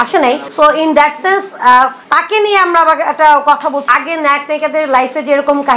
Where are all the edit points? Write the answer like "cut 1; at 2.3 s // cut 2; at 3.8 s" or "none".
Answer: cut 1; at 3.9 s